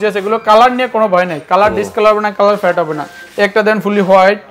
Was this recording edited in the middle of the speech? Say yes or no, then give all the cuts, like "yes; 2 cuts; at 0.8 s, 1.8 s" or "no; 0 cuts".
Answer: no; 0 cuts